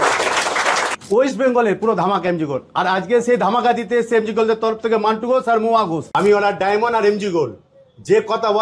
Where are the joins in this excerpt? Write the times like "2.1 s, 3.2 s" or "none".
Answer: 0.9 s, 6.0 s